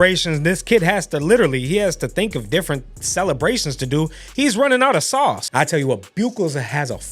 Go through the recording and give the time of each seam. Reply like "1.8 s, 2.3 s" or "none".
5.4 s